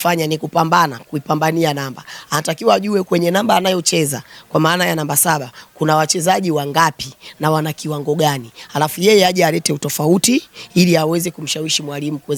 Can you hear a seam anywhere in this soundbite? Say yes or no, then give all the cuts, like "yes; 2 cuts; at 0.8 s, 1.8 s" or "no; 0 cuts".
no; 0 cuts